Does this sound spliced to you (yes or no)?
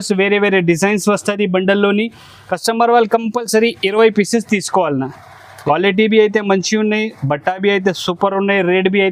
no